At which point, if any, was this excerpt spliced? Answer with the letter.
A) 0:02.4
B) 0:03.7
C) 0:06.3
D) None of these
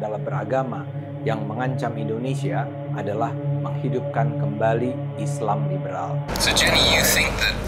C